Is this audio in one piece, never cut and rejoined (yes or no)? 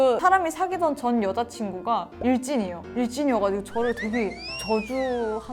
yes